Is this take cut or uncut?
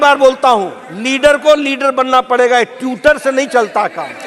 uncut